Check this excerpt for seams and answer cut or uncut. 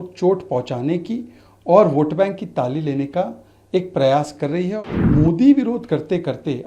cut